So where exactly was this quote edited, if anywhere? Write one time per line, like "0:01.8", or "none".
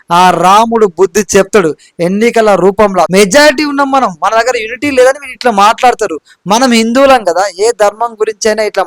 0:03.1